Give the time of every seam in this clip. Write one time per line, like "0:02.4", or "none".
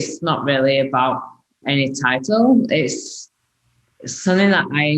0:01.6